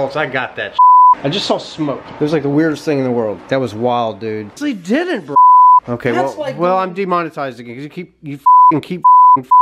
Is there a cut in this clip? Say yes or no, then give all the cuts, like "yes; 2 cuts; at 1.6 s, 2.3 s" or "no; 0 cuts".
yes; 3 cuts; at 1.2 s, 3.3 s, 4.5 s